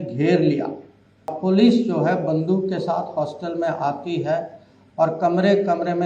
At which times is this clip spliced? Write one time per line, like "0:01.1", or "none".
0:01.3

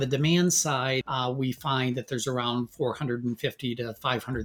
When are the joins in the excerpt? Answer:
0:01.0

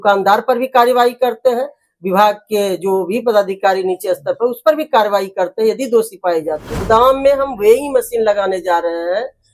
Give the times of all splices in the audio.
0:06.7

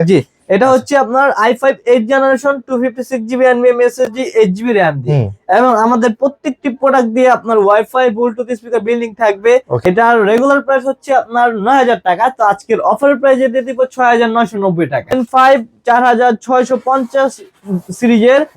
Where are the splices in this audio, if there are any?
0:09.8
0:15.1

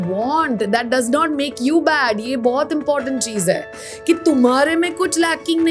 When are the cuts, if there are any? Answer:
none

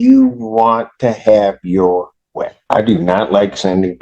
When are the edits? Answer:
0:02.5

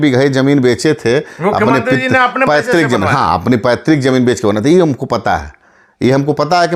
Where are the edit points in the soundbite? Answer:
none

